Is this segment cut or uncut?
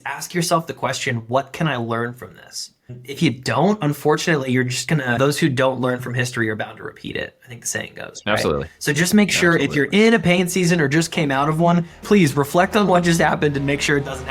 cut